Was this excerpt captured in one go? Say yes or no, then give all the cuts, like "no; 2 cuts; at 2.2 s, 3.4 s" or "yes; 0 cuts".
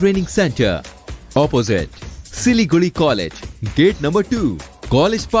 yes; 0 cuts